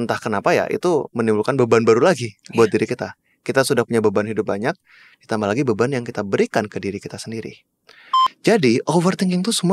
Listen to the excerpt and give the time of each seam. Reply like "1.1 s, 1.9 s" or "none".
8.2 s